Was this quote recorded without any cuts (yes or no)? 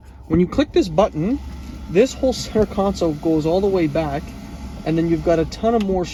yes